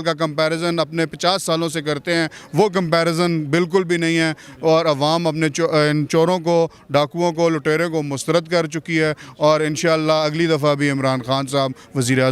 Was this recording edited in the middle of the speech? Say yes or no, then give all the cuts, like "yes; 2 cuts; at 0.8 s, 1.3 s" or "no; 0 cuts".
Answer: no; 0 cuts